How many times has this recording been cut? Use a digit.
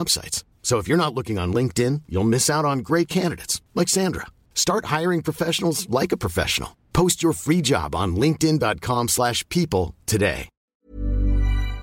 1